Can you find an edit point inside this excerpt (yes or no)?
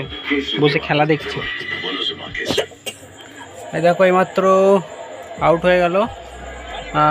no